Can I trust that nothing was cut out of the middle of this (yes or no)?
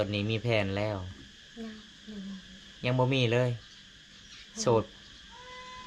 yes